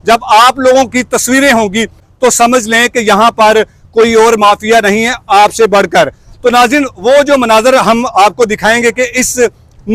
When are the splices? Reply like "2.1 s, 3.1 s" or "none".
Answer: none